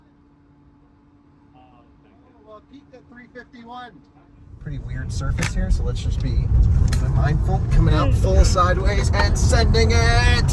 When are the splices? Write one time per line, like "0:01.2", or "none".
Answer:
0:04.5